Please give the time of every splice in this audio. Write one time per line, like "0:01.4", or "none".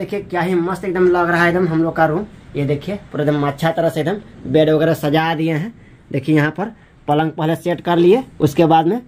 none